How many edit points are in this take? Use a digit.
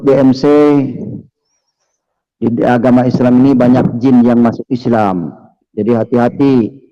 0